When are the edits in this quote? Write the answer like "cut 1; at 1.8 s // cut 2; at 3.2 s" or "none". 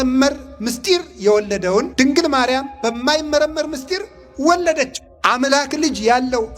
cut 1; at 1.9 s // cut 2; at 5.0 s